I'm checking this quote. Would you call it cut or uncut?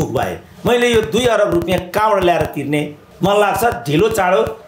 cut